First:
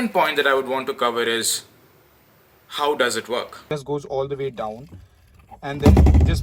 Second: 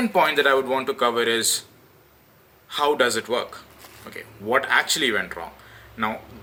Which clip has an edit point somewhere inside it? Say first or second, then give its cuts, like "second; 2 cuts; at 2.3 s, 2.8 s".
first; 1 cut; at 3.7 s